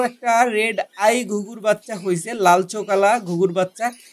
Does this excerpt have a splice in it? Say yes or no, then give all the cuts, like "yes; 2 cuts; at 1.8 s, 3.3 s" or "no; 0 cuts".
no; 0 cuts